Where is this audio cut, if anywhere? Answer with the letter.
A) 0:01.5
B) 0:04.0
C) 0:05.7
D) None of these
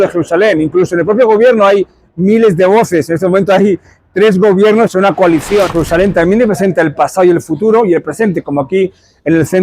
C